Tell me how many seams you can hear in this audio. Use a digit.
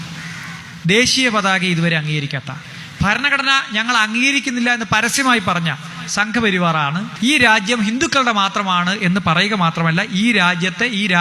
1